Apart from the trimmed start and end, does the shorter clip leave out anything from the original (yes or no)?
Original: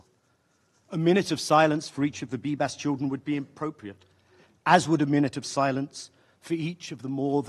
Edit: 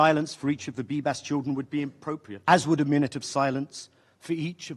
yes